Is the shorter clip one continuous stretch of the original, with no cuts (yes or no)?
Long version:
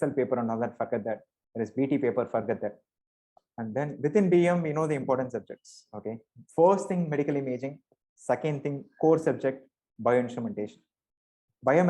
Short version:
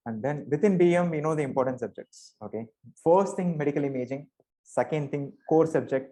yes